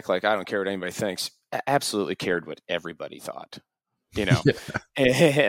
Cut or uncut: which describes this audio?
uncut